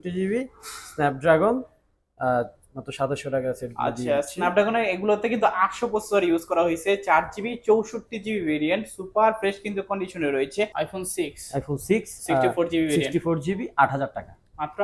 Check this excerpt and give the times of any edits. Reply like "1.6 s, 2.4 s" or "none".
10.7 s